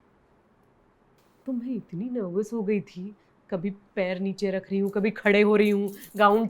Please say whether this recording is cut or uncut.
cut